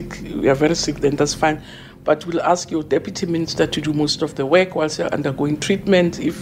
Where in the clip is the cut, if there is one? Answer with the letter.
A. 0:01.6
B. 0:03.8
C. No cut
C